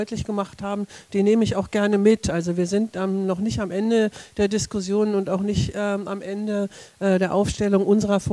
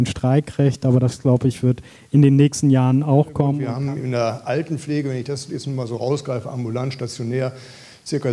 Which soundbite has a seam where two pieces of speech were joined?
second; 1 cut; at 3.6 s

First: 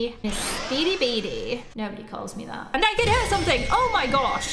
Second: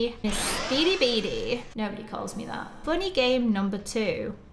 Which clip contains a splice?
first; 1 cut; at 2.7 s

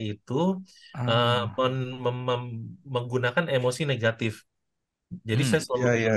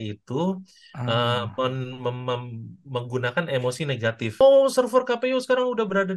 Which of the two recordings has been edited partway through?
second; 1 cut; at 4.4 s

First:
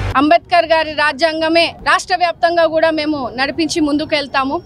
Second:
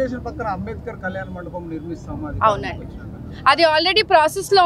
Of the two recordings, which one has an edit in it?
first; 1 cut; at 1.8 s

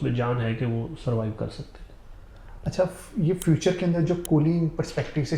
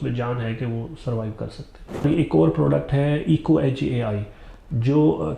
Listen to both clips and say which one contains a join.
second; 1 cut; at 2.0 s

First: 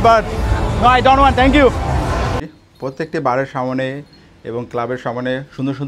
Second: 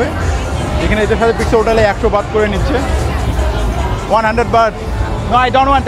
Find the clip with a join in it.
first; 1 cut; at 2.4 s

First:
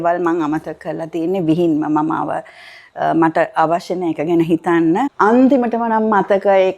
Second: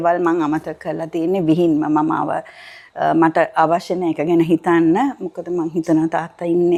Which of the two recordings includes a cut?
first; 1 cut; at 5.1 s

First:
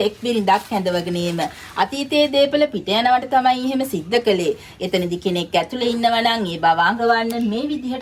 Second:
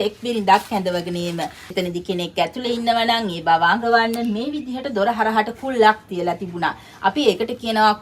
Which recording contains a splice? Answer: second; 1 cut; at 1.6 s

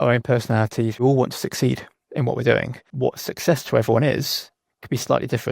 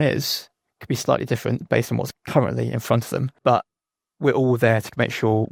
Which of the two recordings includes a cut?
first; 2 cuts; at 1.0 s, 2.9 s

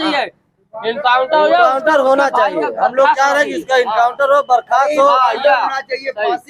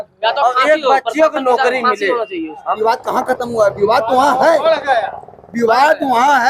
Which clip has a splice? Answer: second; 1 cut; at 2.6 s

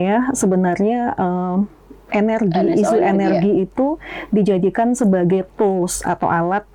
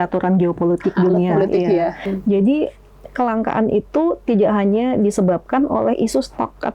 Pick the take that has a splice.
second; 1 cut; at 2.1 s

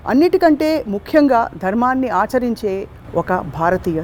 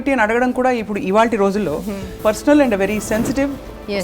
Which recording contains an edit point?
second; 1 cut; at 2.1 s

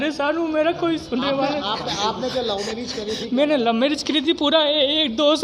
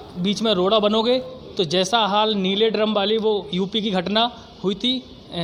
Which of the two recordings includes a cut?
first; 1 cut; at 3.5 s

